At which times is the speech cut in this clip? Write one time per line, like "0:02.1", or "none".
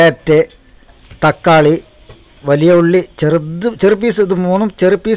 0:01.0
0:02.3